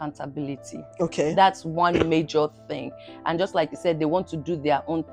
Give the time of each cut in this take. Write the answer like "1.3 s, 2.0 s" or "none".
none